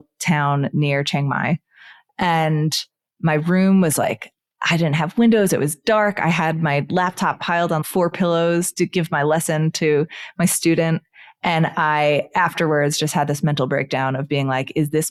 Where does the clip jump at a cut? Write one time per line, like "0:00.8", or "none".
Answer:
none